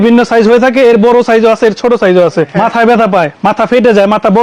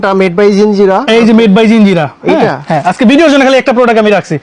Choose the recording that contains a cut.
first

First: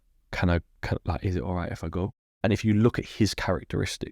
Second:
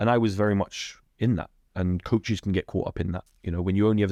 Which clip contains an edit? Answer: first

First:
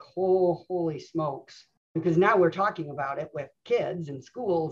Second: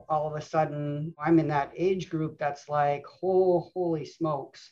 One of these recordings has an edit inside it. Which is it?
second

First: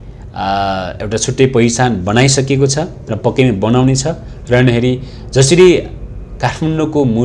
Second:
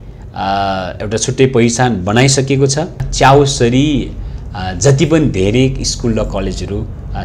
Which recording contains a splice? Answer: second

